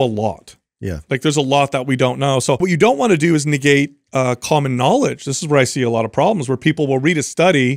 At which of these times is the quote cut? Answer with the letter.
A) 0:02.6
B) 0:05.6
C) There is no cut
A